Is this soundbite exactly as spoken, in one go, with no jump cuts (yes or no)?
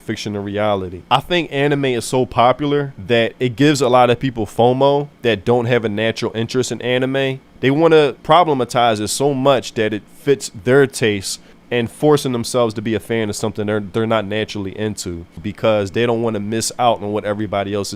no